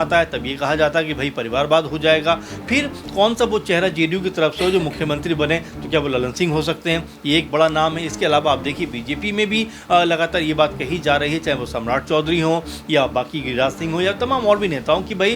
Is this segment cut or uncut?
uncut